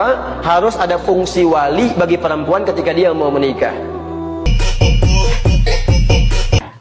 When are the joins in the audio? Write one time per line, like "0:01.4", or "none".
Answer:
0:04.5